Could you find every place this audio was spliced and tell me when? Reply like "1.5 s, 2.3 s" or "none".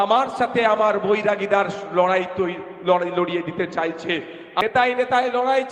4.6 s